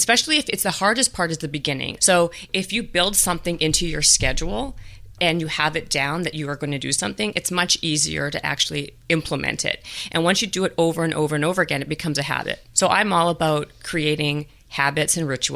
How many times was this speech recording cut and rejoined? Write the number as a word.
two